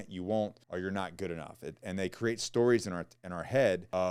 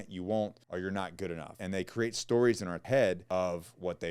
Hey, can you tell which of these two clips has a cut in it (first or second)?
second